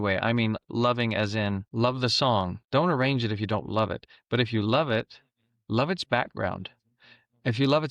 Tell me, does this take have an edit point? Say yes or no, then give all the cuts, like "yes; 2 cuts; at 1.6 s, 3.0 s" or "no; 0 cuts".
yes; 2 cuts; at 1.6 s, 2.6 s